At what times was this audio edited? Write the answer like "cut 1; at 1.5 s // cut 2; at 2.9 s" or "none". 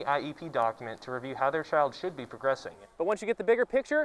cut 1; at 2.9 s